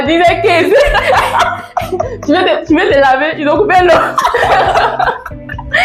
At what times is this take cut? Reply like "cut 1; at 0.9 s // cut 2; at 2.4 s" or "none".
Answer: none